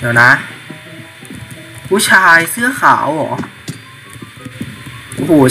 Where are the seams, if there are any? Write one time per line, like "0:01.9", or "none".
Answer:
0:04.5